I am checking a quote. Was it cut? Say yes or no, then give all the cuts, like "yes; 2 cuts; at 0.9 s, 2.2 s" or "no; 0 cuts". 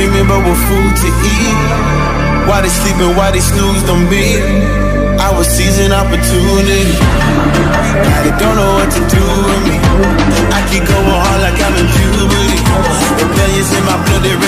no; 0 cuts